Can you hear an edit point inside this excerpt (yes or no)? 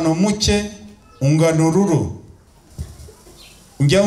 yes